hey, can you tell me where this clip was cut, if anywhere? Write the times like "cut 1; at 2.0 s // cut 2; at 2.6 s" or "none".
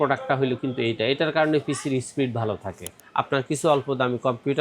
cut 1; at 3.0 s

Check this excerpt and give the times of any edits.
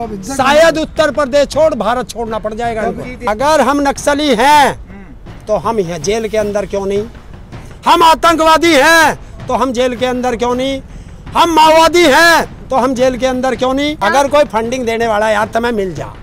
cut 1; at 3.1 s // cut 2; at 14.0 s

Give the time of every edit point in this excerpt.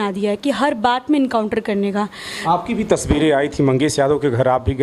cut 1; at 2.4 s

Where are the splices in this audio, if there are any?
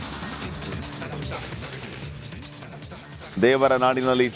none

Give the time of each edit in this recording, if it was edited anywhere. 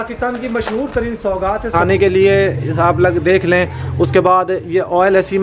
cut 1; at 1.8 s

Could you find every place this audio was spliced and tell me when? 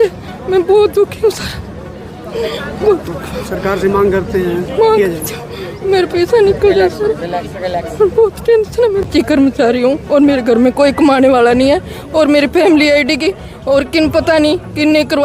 cut 1; at 9.1 s

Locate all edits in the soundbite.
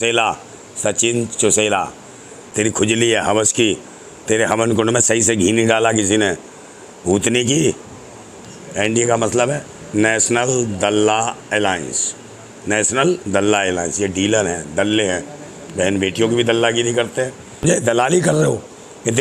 cut 1; at 2.4 s // cut 2; at 8.4 s // cut 3; at 17.6 s

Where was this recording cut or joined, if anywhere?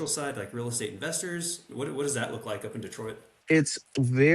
cut 1; at 1.7 s // cut 2; at 3.3 s

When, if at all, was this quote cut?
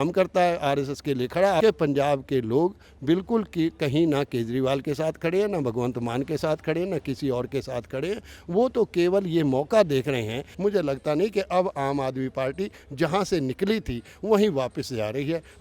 cut 1; at 1.6 s // cut 2; at 10.4 s

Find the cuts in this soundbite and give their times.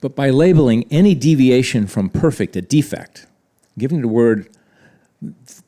none

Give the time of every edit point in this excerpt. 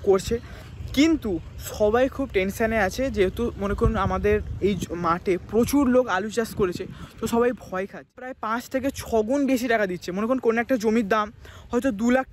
cut 1; at 8.2 s

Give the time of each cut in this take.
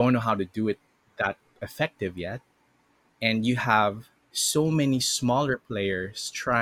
none

